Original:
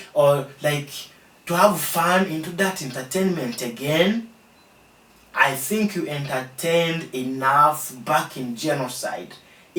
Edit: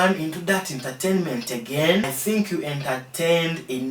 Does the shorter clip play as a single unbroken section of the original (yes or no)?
no